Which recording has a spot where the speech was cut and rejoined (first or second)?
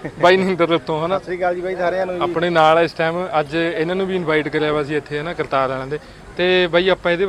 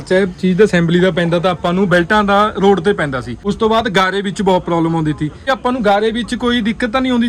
second